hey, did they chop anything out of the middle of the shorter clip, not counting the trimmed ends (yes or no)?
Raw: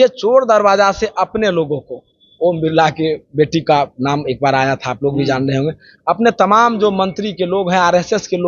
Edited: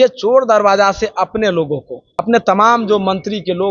yes